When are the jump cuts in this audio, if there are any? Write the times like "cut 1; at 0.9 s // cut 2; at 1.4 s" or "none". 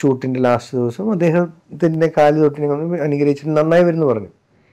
none